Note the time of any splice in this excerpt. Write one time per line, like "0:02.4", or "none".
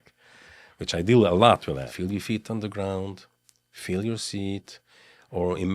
0:01.9